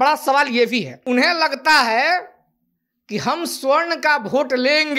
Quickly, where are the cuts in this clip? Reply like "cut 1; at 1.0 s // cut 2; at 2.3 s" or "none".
cut 1; at 0.9 s